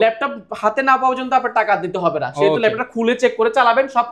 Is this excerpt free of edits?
yes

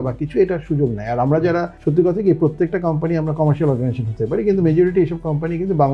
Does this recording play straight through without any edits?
yes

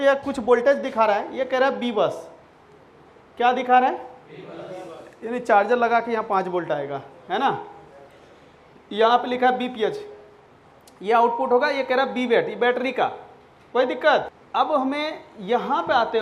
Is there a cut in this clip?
yes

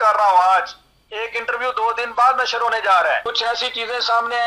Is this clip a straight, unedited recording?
no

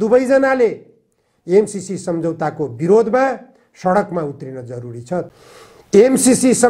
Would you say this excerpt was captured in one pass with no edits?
no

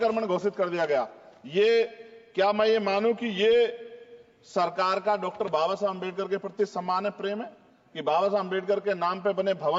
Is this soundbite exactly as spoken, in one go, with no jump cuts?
yes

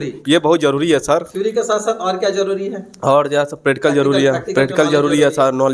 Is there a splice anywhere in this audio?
no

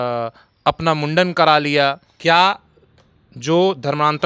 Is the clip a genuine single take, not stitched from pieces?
yes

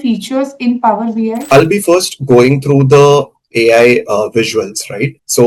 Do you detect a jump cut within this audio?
yes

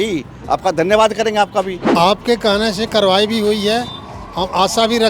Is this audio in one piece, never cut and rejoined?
no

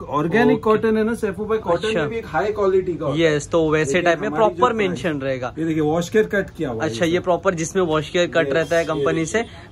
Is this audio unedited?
yes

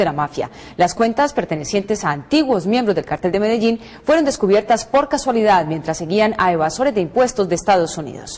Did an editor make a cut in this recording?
no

